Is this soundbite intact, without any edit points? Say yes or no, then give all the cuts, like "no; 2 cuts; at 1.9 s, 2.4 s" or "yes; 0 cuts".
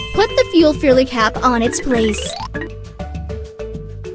no; 1 cut; at 2.2 s